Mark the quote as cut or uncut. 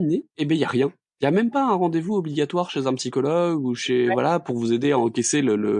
uncut